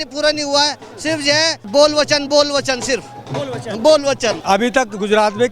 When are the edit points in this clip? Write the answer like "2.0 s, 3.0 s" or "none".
1.6 s, 4.4 s